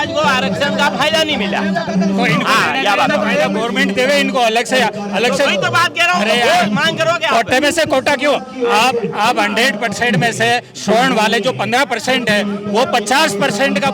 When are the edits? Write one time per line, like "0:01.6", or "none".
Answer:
none